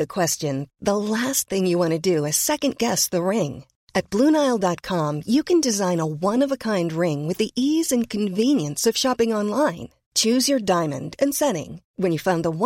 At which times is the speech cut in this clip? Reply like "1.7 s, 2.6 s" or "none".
none